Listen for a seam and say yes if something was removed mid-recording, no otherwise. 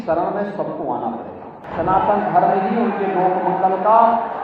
yes